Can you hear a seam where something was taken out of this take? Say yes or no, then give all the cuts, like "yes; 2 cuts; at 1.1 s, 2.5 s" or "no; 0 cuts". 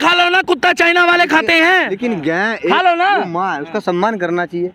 no; 0 cuts